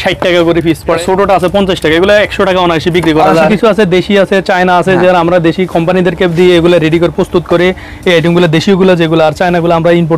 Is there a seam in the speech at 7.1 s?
no; 2 cuts; at 1.0 s, 3.5 s

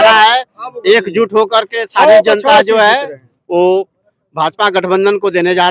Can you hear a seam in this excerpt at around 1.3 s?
no; 0 cuts

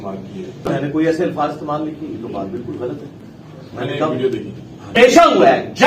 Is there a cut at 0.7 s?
yes; 2 cuts; at 0.7 s, 4.9 s

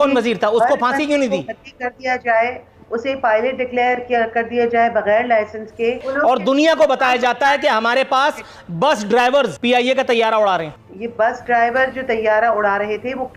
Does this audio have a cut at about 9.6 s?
yes; 2 cuts; at 6.1 s, 9.6 s

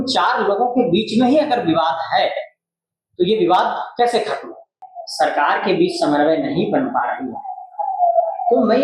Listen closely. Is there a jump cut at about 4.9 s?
yes; 1 cut; at 4.9 s

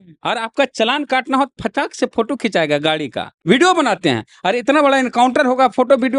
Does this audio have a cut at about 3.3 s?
yes; 1 cut; at 3.3 s

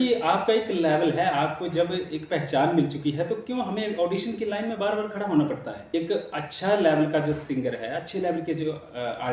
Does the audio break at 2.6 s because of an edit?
no; 1 cut; at 5.9 s

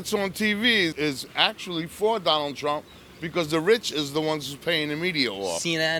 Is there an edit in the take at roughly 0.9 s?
yes; 1 cut; at 0.9 s

